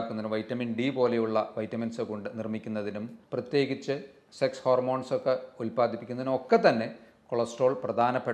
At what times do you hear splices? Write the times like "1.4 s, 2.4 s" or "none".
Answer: 3.2 s